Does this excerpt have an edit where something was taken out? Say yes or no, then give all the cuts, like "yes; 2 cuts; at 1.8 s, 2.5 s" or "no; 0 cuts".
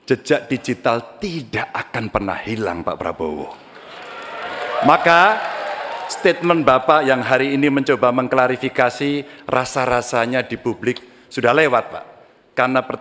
no; 0 cuts